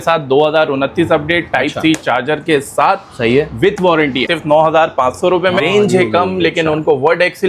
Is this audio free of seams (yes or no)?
no